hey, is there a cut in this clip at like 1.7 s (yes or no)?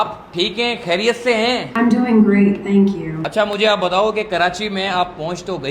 yes